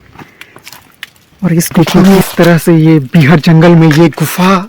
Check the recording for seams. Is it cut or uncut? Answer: cut